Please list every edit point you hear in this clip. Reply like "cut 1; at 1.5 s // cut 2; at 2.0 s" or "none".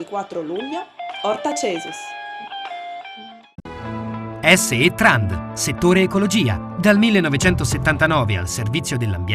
cut 1; at 3.6 s